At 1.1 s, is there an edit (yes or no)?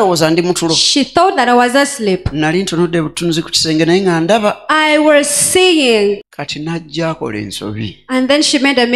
no